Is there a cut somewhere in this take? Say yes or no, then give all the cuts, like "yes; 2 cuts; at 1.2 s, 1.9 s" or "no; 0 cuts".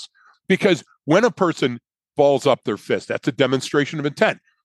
no; 0 cuts